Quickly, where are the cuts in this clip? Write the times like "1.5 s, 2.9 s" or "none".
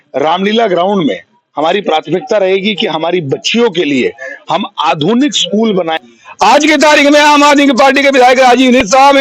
6.0 s

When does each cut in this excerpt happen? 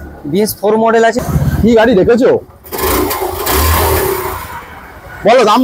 1.2 s

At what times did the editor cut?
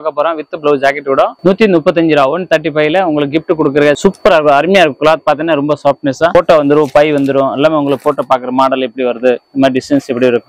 4.0 s

